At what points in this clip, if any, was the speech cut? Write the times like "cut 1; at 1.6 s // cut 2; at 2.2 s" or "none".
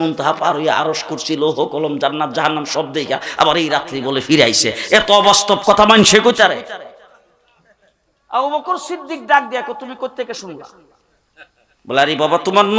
none